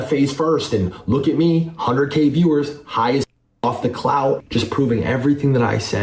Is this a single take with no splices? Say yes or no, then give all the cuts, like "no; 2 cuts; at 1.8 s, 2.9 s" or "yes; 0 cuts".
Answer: no; 1 cut; at 4.4 s